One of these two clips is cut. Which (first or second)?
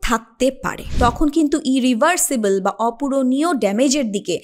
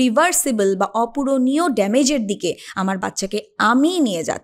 first